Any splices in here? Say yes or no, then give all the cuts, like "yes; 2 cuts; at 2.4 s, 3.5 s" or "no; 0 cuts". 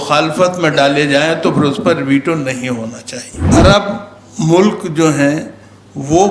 yes; 1 cut; at 3.6 s